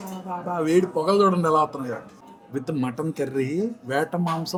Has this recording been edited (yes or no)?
no